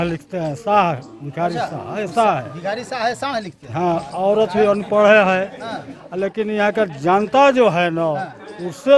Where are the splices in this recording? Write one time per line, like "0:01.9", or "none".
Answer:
none